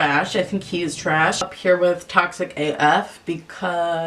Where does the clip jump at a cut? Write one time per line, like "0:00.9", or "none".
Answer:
0:01.5